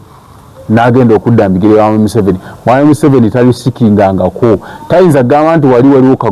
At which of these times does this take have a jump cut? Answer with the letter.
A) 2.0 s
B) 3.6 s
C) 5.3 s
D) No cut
D